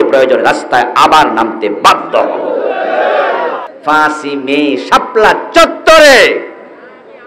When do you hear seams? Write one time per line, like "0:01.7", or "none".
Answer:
0:03.7